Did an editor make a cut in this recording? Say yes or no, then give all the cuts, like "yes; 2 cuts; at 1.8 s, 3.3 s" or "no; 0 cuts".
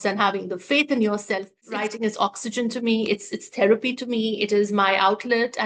yes; 1 cut; at 1.8 s